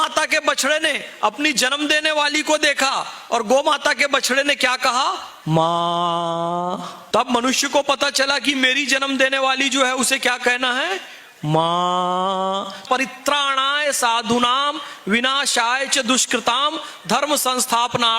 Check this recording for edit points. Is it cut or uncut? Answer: cut